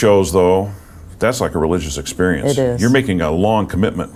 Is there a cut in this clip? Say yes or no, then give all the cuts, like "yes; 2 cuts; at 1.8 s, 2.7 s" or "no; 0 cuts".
no; 0 cuts